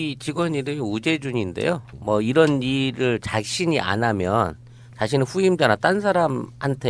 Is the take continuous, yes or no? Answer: no